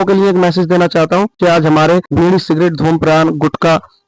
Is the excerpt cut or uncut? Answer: cut